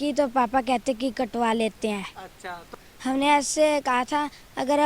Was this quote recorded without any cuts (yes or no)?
no